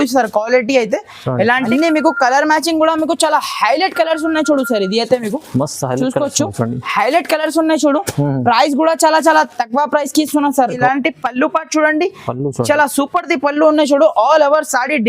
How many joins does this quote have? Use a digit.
2